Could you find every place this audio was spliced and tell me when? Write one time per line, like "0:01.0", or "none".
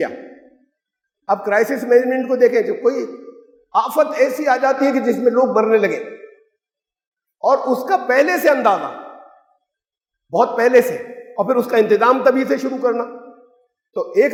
none